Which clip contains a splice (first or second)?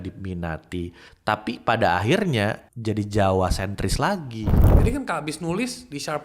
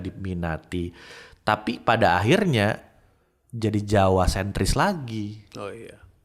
first